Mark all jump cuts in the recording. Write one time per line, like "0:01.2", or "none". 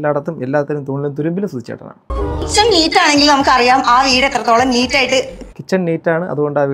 0:02.0